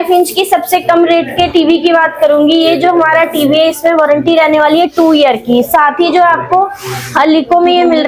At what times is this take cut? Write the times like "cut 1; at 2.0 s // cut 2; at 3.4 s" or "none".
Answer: none

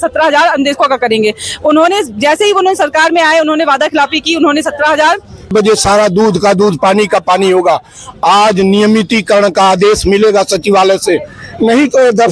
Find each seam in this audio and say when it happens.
cut 1; at 5.5 s

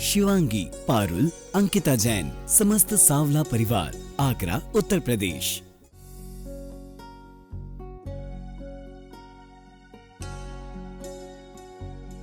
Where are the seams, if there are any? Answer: cut 1; at 5.4 s

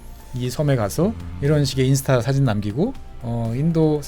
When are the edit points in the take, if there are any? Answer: cut 1; at 1.3 s

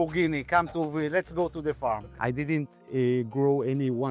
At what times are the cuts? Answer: cut 1; at 2.1 s

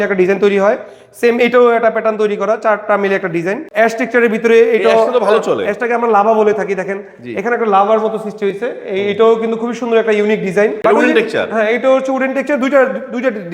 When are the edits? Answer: cut 1; at 3.6 s // cut 2; at 10.8 s

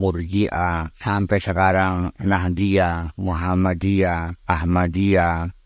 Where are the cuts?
cut 1; at 0.9 s // cut 2; at 4.3 s

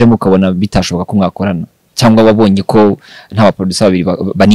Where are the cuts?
none

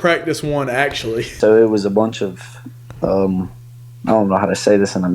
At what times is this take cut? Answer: cut 1; at 1.3 s

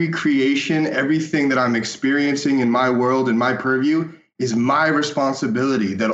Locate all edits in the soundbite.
none

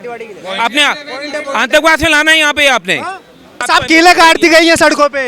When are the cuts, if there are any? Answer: cut 1; at 3.6 s

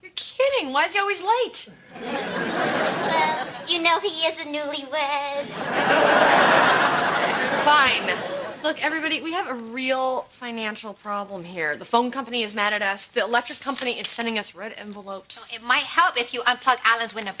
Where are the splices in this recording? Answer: cut 1; at 7.2 s

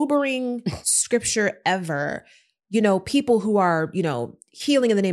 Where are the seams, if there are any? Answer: none

